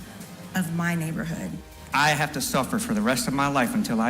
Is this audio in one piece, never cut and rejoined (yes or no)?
no